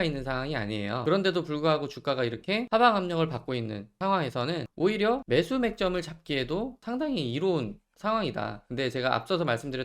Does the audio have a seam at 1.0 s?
yes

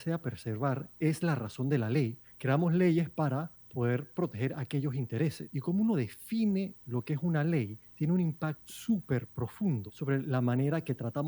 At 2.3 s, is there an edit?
yes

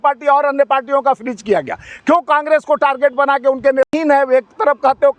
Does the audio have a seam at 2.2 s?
no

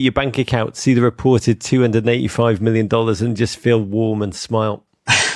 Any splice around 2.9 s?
no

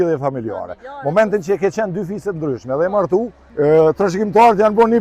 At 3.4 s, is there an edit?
yes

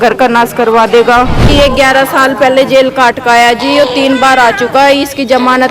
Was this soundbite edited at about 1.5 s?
yes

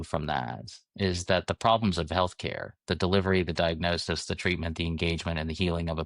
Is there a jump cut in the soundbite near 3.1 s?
no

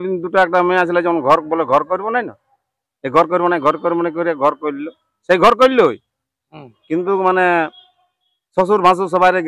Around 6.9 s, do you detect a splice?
no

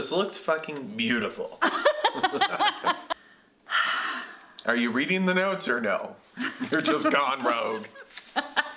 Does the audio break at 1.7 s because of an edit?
no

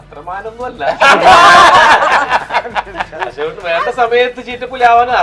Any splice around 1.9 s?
no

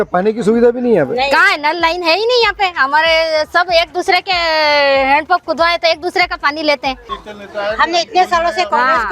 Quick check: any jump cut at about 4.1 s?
no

